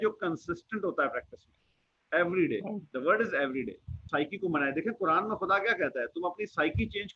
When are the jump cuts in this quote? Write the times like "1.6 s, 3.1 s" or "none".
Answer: 4.1 s